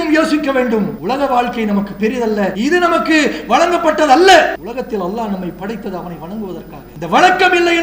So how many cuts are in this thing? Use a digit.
4